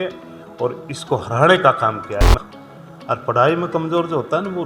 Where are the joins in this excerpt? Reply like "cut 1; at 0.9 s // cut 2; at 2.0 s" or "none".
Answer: cut 1; at 2.3 s